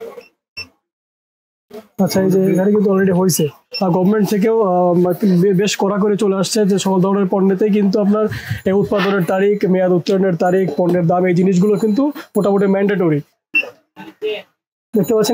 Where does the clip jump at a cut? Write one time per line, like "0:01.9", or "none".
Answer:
0:03.6
0:13.3